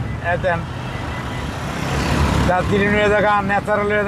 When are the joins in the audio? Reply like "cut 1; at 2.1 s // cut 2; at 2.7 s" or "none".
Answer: none